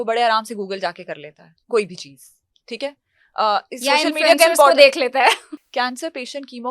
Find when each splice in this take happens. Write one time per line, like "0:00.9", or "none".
0:05.5